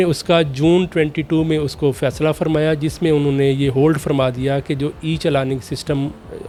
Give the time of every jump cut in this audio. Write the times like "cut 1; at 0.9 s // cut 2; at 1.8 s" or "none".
none